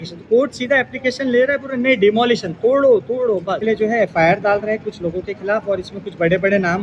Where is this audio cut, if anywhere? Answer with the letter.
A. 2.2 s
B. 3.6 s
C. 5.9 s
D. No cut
B